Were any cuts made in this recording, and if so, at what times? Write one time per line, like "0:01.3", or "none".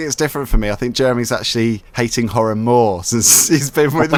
none